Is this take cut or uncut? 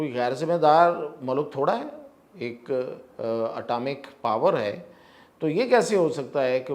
uncut